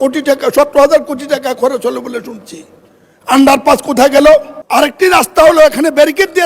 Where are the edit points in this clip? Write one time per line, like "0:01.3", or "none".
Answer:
0:04.6